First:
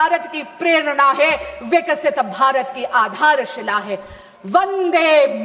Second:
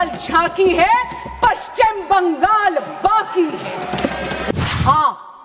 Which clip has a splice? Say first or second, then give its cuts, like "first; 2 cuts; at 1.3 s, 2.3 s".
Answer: second; 1 cut; at 4.5 s